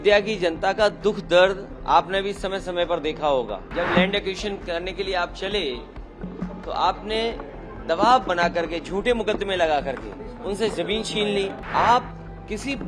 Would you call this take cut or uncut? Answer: cut